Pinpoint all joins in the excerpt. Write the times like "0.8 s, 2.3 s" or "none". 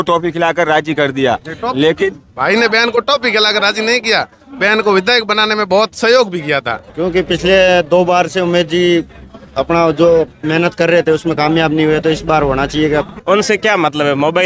6.8 s, 13.1 s